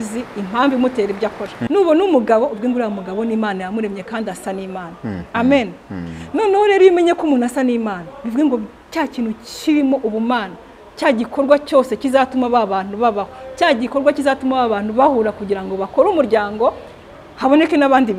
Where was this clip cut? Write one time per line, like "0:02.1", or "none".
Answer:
0:01.5